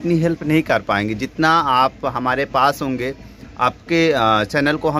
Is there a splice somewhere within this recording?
no; 0 cuts

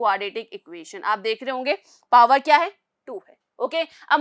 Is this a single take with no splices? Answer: yes; 0 cuts

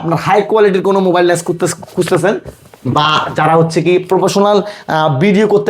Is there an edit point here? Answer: no; 0 cuts

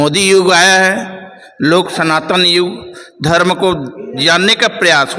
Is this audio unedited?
yes; 0 cuts

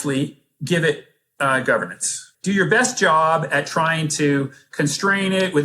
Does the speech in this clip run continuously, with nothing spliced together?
no; 1 cut; at 2.3 s

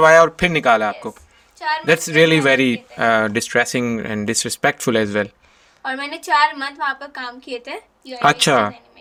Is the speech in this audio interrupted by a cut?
no; 0 cuts

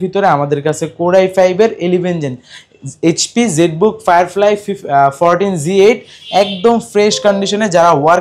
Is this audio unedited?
yes; 0 cuts

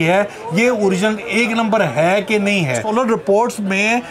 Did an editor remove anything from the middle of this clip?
yes; 1 cut; at 2.8 s

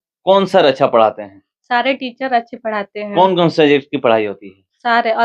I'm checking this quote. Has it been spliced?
no; 0 cuts

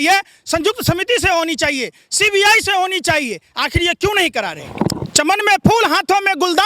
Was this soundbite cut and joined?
yes; 1 cut; at 4.7 s

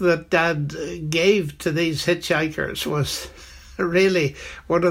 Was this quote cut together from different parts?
no; 0 cuts

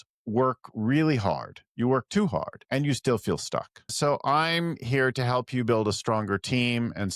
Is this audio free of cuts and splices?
no; 2 cuts; at 2.6 s, 3.9 s

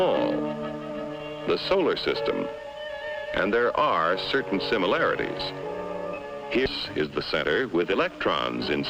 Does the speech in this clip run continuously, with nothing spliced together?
no; 1 cut; at 3.9 s

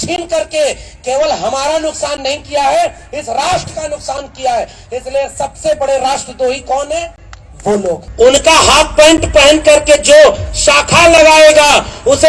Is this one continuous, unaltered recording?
no; 1 cut; at 8.1 s

